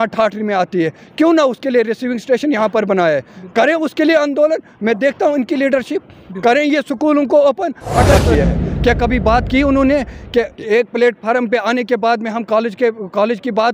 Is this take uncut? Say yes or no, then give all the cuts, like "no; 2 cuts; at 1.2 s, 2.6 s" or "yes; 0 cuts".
no; 1 cut; at 8.2 s